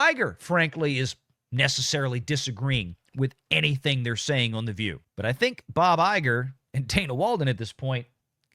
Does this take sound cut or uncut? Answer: cut